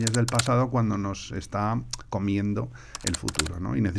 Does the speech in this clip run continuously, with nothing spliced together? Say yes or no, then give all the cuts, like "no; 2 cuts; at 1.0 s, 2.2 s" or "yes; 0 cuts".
yes; 0 cuts